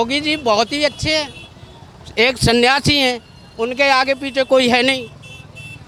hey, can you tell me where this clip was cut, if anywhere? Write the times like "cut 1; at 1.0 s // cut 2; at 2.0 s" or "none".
none